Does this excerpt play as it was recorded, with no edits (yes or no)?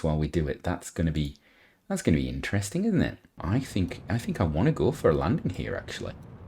yes